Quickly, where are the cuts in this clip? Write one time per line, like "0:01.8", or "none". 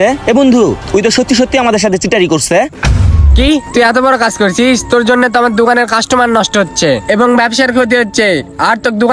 0:02.7